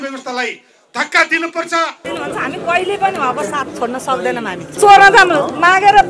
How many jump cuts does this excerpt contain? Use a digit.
2